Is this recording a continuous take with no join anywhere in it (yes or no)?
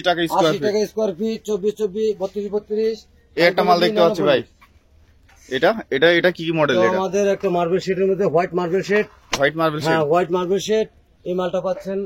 yes